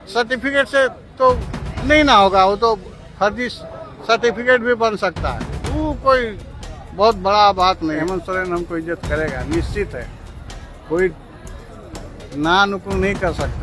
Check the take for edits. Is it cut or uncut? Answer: cut